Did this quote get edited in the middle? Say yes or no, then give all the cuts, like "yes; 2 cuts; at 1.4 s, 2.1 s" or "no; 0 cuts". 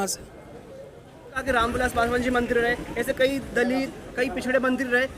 yes; 1 cut; at 1.4 s